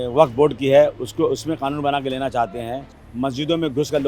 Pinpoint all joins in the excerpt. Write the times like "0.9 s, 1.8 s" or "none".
3.0 s